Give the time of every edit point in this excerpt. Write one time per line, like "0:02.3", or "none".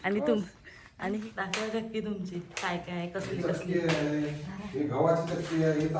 0:01.2